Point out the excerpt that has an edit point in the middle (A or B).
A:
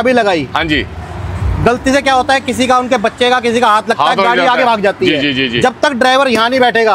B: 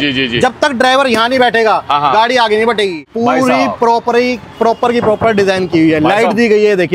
B